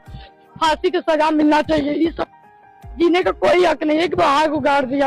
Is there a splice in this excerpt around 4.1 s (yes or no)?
yes